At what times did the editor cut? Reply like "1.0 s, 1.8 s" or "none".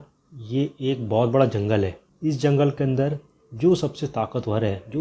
2.0 s